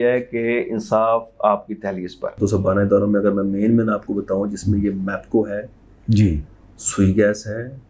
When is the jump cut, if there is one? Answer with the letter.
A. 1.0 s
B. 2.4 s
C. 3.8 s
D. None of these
B